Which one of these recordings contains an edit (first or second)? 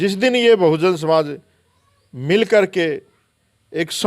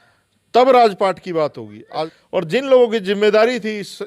second